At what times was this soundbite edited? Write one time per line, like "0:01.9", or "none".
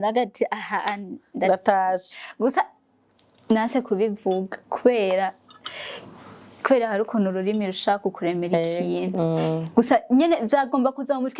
none